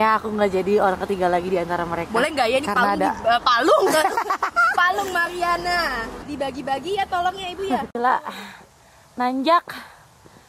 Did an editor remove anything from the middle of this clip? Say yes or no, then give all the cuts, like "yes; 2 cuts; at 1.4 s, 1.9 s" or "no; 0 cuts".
no; 0 cuts